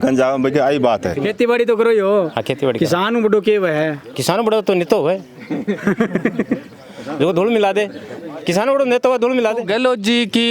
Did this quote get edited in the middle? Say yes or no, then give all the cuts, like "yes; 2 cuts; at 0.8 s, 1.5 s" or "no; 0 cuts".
yes; 2 cuts; at 1.2 s, 9.6 s